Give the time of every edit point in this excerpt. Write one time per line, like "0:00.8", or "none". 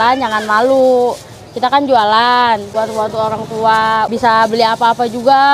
0:02.7
0:04.1